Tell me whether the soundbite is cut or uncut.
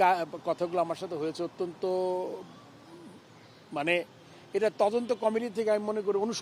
uncut